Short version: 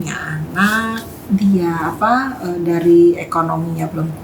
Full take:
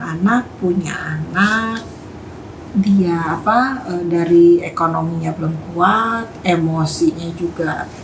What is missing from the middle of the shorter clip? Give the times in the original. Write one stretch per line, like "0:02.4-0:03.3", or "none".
0:01.9-0:02.6